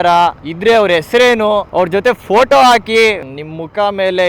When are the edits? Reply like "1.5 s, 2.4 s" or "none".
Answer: 3.2 s